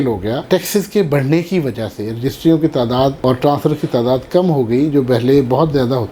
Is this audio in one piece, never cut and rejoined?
yes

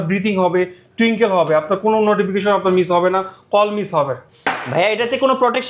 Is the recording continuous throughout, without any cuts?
no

